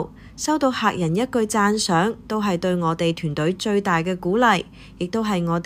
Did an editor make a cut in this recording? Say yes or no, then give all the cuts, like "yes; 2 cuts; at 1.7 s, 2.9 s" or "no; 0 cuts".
no; 0 cuts